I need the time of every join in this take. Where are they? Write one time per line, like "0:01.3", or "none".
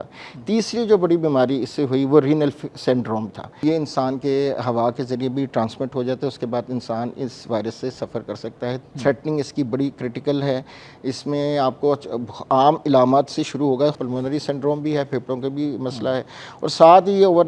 0:03.6
0:08.8
0:14.0

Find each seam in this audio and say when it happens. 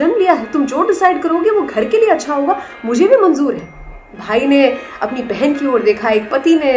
none

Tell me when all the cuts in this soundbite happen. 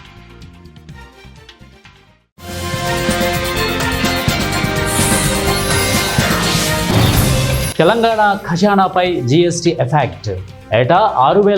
0:03.7
0:07.7

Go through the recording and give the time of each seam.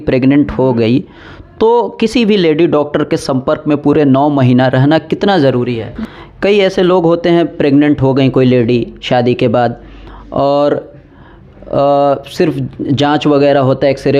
0:05.9

